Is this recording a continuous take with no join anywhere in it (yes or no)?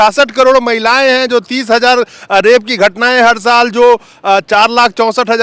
yes